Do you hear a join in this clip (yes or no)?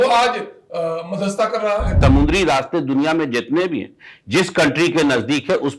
yes